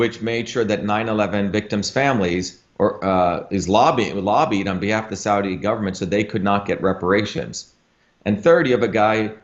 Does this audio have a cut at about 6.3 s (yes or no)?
no